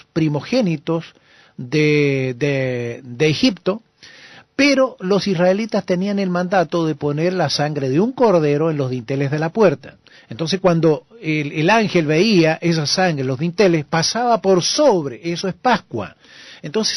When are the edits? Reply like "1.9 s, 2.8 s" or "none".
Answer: 9.9 s